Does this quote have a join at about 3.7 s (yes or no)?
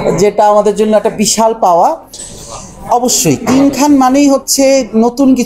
no